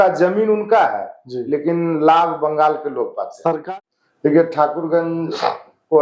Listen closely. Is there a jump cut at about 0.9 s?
no; 1 cut; at 3.5 s

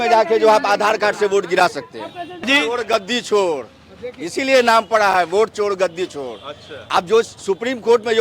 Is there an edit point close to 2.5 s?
yes; 1 cut; at 2.5 s

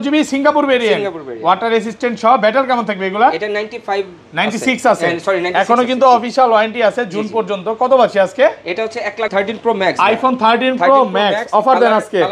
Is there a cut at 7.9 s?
no; 1 cut; at 9.3 s

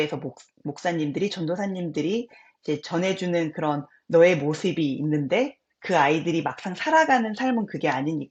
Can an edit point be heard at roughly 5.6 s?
no; 0 cuts

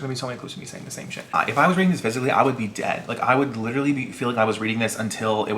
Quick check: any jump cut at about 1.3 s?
yes; 1 cut; at 1.3 s

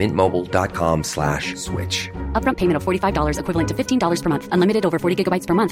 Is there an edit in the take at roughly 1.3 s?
no; 0 cuts

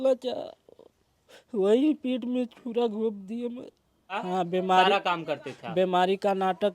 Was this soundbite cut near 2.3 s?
no; 1 cut; at 4.1 s

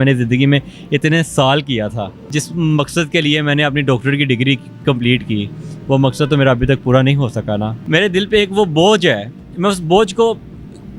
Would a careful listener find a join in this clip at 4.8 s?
no; 2 cuts; at 2.3 s, 7.8 s

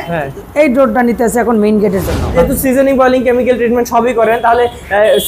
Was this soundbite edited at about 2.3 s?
yes; 1 cut; at 2.3 s

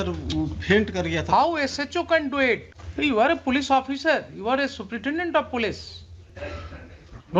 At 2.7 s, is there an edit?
yes; 1 cut; at 2.7 s

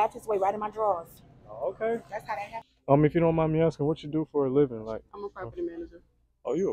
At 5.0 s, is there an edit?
no; 1 cut; at 2.7 s

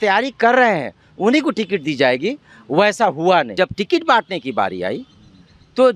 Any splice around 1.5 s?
no; 1 cut; at 3.5 s

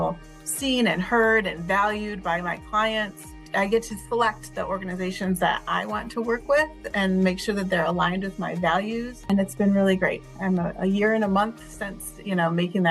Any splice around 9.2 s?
yes; 2 cuts; at 3.5 s, 9.2 s

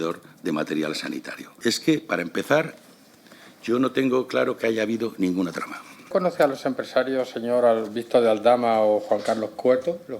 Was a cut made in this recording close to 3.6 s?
no; 2 cuts; at 1.5 s, 6.1 s

